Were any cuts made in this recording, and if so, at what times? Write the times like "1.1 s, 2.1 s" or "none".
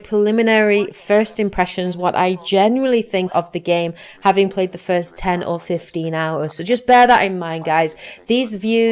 2.4 s